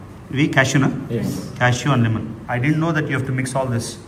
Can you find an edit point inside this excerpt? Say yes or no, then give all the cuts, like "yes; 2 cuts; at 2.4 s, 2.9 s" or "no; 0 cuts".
no; 0 cuts